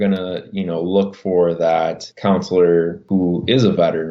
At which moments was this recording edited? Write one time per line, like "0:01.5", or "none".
0:02.1
0:03.0